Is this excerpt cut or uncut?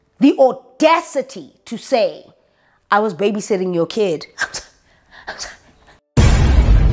uncut